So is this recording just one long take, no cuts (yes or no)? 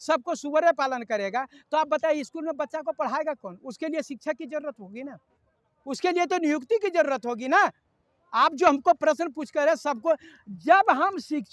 yes